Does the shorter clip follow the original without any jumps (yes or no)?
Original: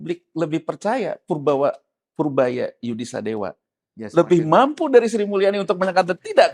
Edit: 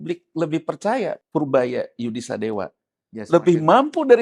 no